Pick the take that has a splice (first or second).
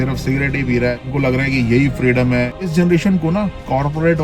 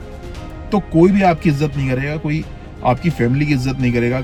first